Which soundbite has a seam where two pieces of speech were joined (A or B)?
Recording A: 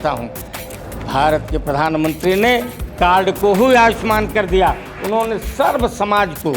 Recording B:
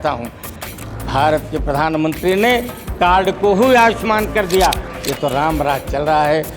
B